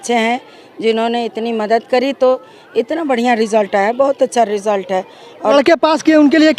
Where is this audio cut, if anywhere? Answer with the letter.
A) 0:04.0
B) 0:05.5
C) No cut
B